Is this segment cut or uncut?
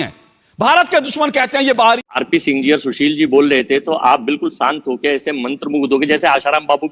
cut